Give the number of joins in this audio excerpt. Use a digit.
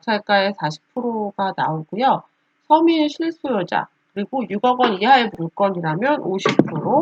0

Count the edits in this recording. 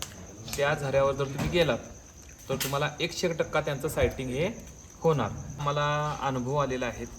1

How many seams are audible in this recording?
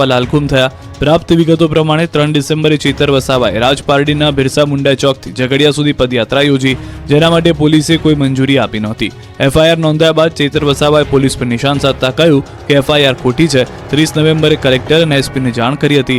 0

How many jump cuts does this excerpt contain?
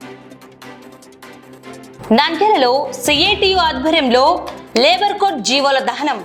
1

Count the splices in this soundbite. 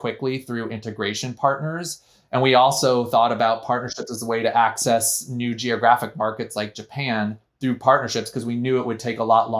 0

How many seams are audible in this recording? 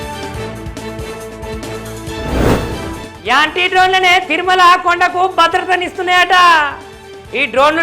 1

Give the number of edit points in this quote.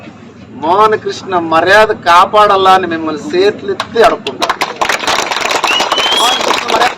0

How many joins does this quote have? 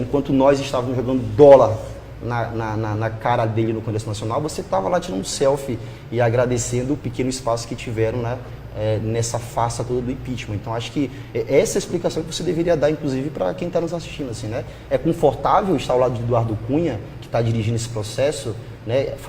1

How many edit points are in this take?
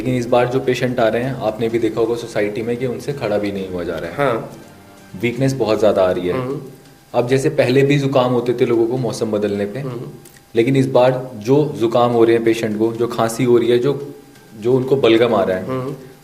0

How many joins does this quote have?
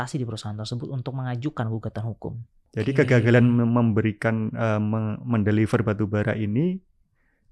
1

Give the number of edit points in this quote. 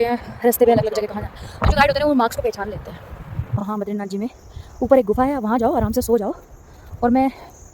1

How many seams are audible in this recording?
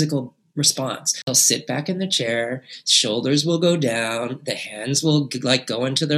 1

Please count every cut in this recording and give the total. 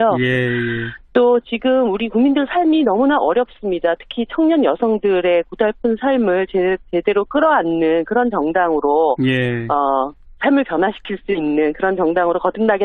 0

